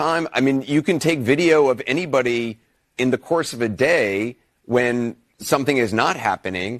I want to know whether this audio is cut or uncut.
cut